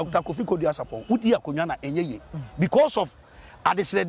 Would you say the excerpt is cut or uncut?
uncut